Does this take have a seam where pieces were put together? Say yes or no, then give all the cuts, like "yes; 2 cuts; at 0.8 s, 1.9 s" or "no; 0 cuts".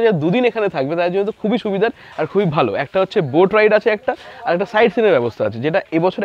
no; 0 cuts